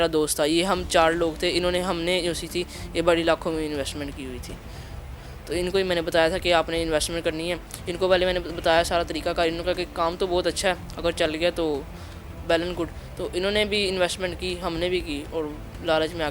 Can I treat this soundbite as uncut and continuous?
yes; 0 cuts

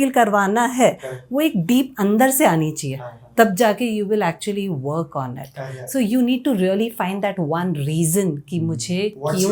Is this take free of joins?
yes; 0 cuts

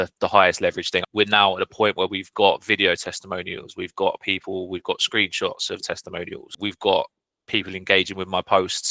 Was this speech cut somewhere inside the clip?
yes; 2 cuts; at 1.1 s, 6.4 s

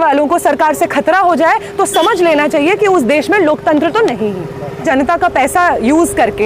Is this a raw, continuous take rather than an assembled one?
no; 1 cut; at 4.8 s

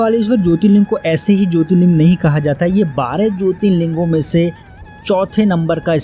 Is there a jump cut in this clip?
no; 0 cuts

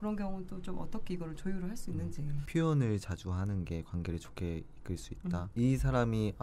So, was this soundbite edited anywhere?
yes; 2 cuts; at 2.4 s, 5.5 s

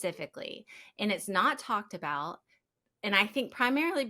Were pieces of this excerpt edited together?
no; 0 cuts

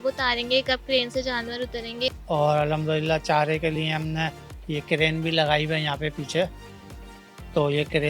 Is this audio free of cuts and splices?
no; 1 cut; at 2.2 s

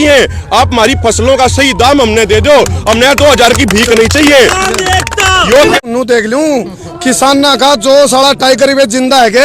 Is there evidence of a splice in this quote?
yes; 1 cut; at 5.8 s

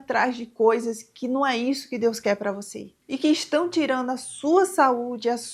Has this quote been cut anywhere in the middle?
no; 0 cuts

